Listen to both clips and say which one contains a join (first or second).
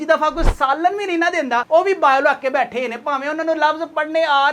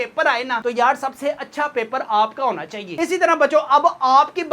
second